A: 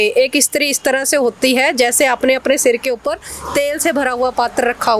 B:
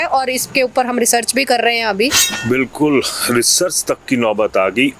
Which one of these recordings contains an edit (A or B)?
B